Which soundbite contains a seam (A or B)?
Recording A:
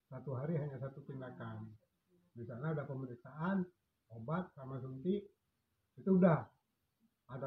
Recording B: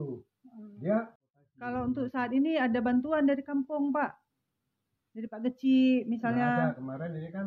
B